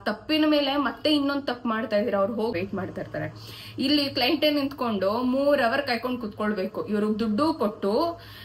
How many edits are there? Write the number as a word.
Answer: one